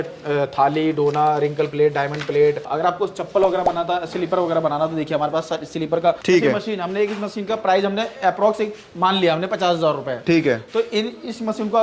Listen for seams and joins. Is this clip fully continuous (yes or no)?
no